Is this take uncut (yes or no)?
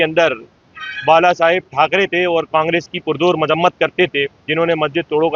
yes